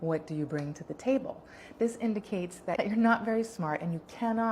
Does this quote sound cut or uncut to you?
cut